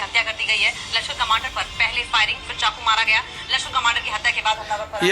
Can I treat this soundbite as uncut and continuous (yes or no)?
yes